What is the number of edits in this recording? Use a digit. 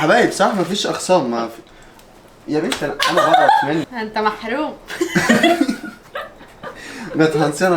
1